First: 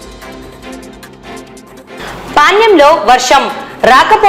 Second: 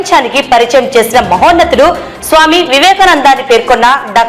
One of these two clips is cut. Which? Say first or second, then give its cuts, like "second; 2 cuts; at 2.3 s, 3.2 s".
first; 1 cut; at 1.7 s